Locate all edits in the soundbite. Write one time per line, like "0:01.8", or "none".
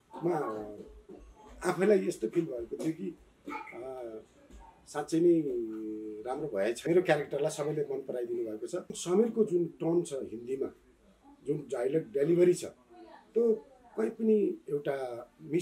0:06.8
0:09.0